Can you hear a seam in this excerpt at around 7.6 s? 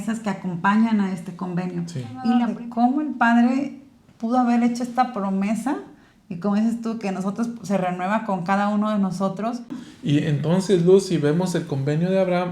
no; 2 cuts; at 2.4 s, 9.9 s

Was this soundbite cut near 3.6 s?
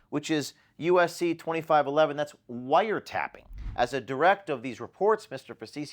yes; 1 cut; at 3.6 s

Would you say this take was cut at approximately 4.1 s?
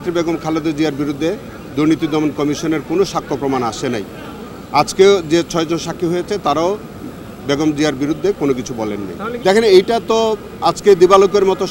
no; 0 cuts

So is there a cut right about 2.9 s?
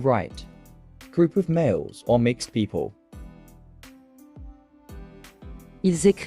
yes; 2 cuts; at 2.9 s, 5.2 s

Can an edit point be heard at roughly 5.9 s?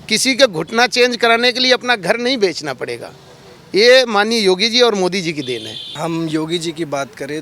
yes; 1 cut; at 5.9 s

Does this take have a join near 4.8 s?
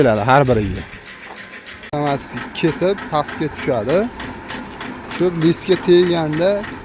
no; 1 cut; at 1.9 s

